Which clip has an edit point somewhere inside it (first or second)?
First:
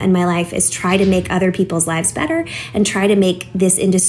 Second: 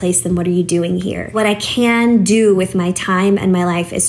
second